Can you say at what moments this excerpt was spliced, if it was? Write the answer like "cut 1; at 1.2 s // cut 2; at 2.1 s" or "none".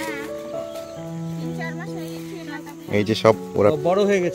cut 1; at 2.9 s